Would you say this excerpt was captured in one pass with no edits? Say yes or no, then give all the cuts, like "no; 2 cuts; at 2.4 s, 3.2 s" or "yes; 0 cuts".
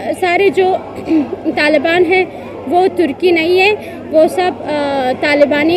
yes; 0 cuts